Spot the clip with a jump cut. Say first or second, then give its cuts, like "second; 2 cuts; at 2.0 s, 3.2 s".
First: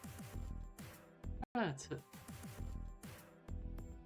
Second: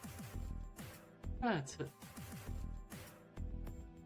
second; 1 cut; at 1.4 s